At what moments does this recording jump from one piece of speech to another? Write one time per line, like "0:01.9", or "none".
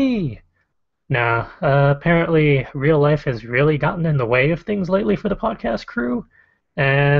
none